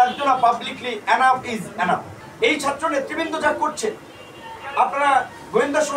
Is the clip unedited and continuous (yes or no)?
no